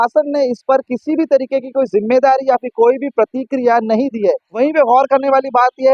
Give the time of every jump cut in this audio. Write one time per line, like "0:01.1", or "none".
0:04.5